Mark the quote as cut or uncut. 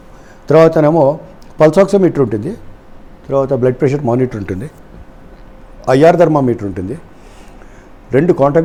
uncut